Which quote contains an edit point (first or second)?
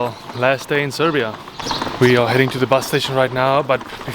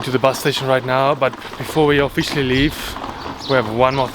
first